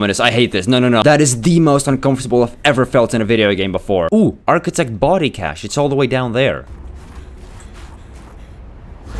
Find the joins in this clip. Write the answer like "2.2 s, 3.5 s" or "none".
1.0 s, 4.1 s, 6.8 s